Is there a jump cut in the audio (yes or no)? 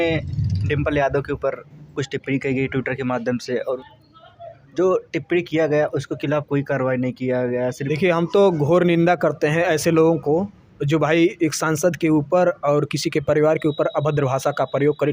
yes